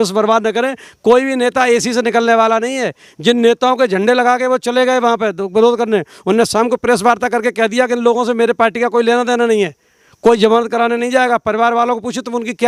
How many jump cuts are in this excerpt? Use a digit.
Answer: 0